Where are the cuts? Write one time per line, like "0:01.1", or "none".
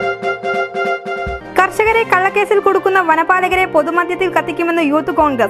none